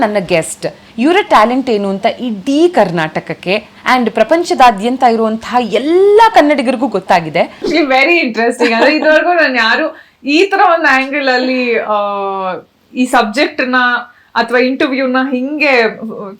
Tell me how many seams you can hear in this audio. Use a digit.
1